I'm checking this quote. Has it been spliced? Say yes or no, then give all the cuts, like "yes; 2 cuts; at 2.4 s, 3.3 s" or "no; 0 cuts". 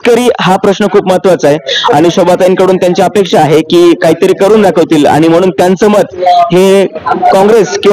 no; 0 cuts